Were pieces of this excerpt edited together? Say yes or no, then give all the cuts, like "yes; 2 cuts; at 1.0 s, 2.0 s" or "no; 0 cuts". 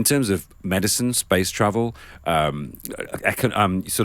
no; 0 cuts